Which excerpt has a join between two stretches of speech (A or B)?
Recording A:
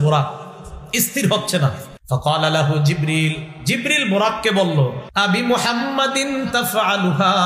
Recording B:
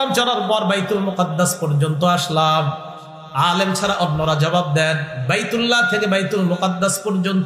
A